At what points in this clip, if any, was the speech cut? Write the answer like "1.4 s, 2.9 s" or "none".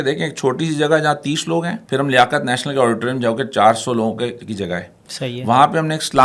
1.8 s